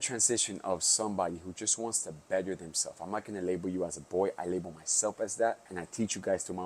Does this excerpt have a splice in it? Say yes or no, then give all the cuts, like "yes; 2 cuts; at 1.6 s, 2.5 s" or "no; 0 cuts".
yes; 1 cut; at 5.8 s